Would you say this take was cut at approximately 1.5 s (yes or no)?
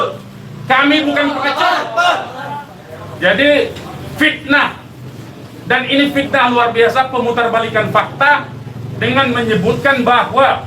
yes